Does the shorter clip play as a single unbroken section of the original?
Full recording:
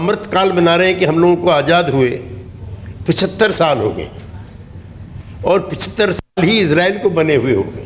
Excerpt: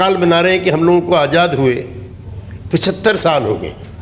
yes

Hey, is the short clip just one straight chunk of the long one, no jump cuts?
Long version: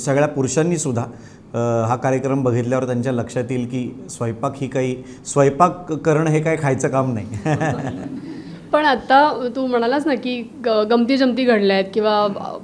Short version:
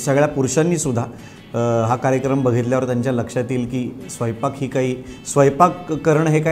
yes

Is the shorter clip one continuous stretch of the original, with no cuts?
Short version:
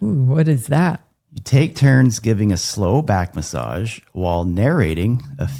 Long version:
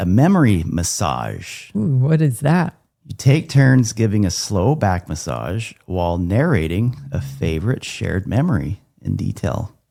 yes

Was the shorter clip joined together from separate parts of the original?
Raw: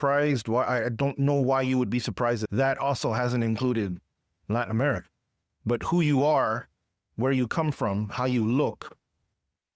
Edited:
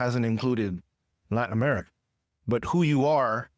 no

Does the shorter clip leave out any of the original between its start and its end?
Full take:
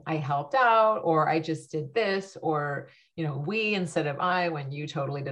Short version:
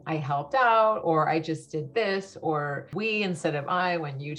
yes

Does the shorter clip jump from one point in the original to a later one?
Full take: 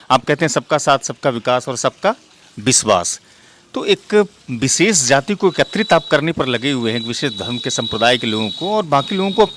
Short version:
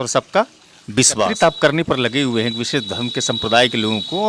yes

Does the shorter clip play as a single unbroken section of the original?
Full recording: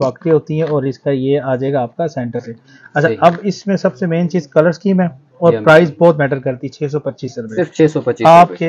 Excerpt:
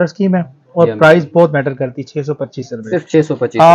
yes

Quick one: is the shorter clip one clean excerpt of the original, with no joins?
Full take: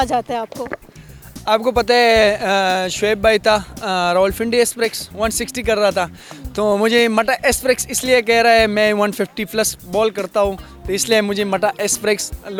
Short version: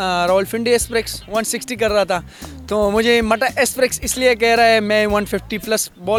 yes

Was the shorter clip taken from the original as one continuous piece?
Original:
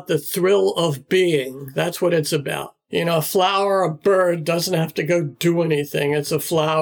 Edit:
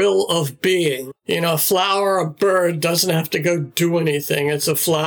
no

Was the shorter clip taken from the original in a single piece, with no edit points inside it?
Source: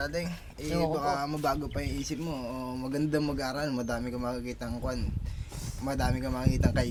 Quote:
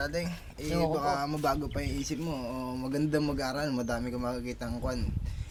yes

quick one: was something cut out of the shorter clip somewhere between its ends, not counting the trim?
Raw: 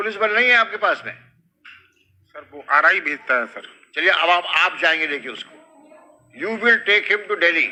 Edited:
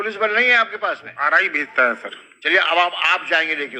yes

